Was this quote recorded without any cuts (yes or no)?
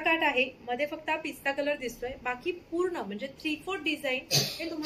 yes